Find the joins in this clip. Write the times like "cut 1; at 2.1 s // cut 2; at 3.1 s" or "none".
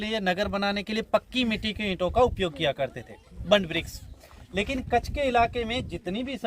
none